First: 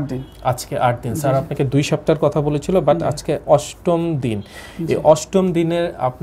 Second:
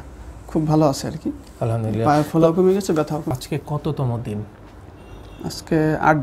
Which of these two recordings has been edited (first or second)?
second